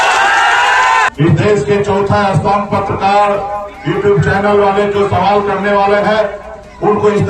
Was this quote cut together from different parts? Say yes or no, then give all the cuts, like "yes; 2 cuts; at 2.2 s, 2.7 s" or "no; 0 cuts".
yes; 1 cut; at 1.1 s